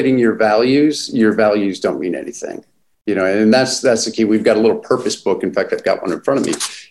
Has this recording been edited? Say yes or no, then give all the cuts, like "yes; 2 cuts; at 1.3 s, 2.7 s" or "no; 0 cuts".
no; 0 cuts